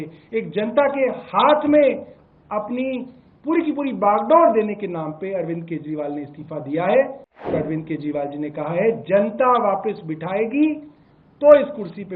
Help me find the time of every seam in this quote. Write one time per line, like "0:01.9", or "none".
0:07.5